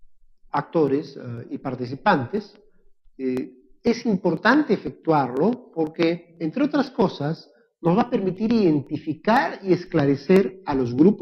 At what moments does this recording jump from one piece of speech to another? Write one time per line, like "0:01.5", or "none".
none